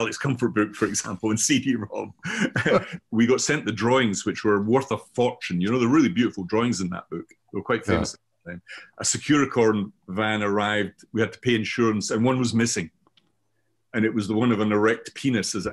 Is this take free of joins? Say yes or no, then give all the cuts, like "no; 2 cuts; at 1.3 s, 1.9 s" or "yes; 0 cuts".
no; 1 cut; at 3.0 s